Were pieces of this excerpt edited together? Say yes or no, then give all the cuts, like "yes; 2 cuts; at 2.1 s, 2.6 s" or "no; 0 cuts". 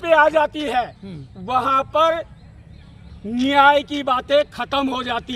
no; 0 cuts